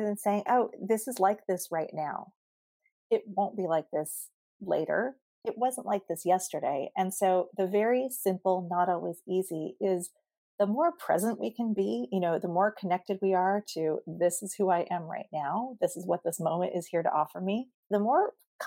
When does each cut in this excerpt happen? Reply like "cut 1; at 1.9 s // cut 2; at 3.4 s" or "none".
cut 1; at 17.8 s